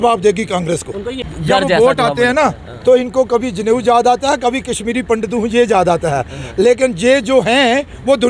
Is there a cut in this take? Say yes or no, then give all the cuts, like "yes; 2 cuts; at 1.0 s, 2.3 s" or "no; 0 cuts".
yes; 1 cut; at 1.2 s